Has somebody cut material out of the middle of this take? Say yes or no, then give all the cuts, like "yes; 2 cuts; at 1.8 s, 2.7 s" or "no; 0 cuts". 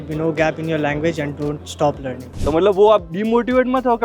yes; 1 cut; at 2.3 s